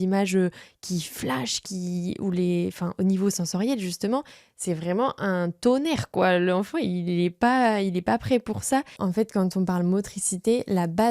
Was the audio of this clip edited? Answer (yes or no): yes